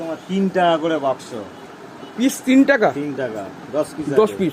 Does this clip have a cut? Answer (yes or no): no